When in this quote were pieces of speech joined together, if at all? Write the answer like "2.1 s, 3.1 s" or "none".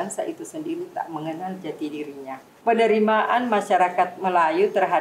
2.5 s